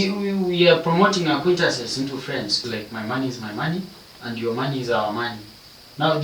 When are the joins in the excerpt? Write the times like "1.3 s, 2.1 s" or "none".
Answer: 2.6 s

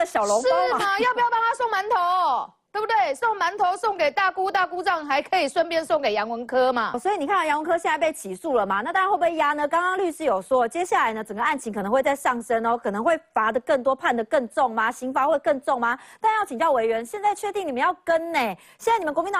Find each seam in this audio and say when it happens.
7.0 s

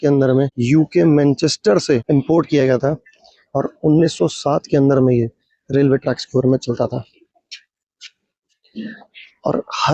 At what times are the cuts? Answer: none

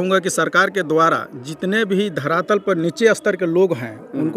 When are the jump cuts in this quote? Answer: none

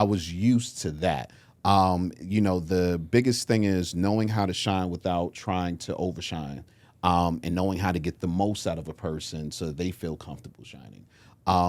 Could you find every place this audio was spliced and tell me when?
none

